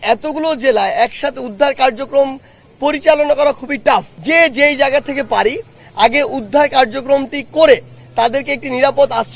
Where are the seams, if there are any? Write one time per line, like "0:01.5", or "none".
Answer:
0:04.1